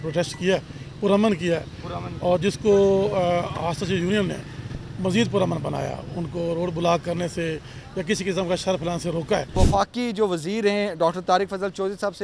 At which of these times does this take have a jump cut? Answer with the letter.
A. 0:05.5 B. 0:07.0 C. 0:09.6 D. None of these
C